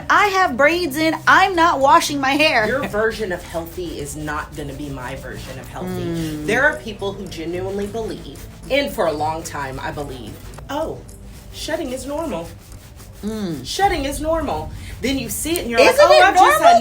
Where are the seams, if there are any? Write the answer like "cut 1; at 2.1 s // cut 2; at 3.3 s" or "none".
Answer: cut 1; at 2.7 s // cut 2; at 8.6 s // cut 3; at 10.4 s

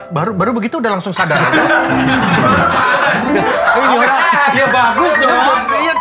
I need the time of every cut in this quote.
none

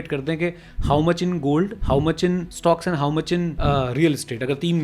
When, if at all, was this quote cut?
cut 1; at 2.2 s // cut 2; at 3.5 s

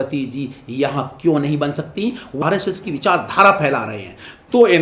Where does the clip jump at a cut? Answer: cut 1; at 2.3 s

